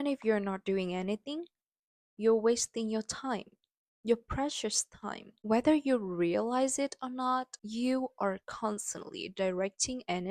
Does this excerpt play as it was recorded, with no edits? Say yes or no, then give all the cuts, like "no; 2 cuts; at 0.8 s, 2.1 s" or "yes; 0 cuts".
yes; 0 cuts